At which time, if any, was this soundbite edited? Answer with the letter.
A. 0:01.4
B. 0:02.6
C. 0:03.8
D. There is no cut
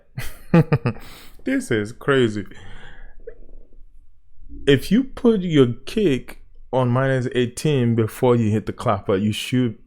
D